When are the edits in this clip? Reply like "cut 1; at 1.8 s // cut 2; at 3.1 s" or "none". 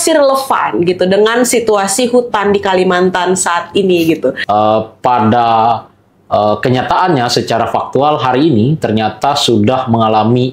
cut 1; at 4.4 s

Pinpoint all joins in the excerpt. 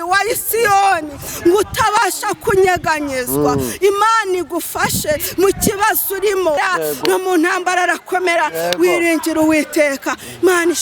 cut 1; at 6.6 s

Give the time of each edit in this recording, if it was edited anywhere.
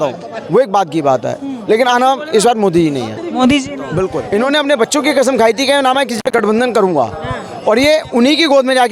cut 1; at 4.2 s

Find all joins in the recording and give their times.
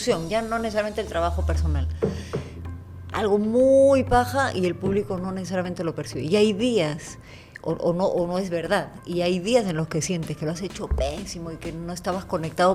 none

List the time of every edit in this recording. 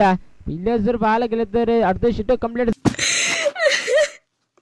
cut 1; at 2.7 s

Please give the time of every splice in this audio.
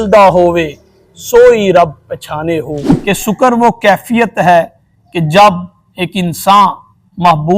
cut 1; at 2.9 s

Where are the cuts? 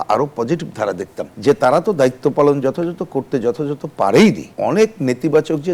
cut 1; at 1.3 s // cut 2; at 4.5 s

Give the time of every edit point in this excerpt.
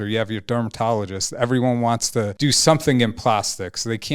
cut 1; at 2.3 s

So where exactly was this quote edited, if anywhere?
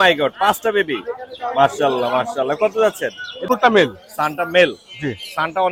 cut 1; at 3.4 s

